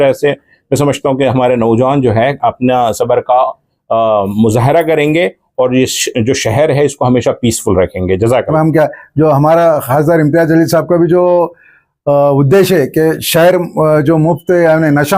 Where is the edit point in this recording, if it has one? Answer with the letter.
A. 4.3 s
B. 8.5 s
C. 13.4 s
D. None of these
B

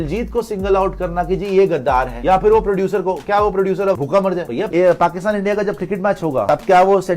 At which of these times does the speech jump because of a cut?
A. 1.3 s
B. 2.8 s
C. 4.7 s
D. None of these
C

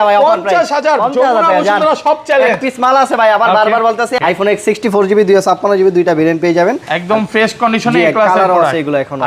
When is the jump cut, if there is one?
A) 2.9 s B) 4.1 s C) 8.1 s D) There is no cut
B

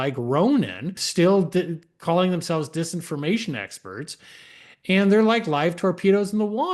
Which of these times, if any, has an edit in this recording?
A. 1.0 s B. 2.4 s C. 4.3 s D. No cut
A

